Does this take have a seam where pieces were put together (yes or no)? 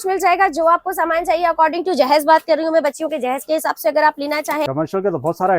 yes